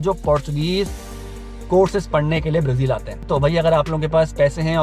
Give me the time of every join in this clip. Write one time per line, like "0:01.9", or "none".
0:03.2